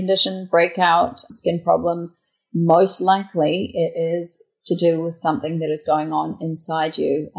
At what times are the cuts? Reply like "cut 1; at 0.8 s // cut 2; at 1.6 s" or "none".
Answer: cut 1; at 1.3 s